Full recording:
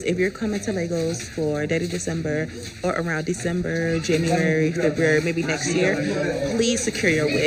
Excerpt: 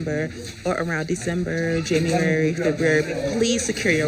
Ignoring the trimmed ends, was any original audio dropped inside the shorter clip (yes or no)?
yes